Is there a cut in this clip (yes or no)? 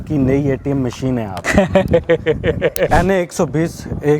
yes